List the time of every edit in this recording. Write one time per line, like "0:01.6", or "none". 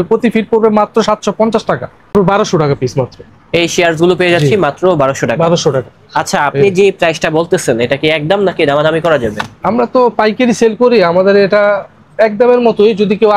0:02.1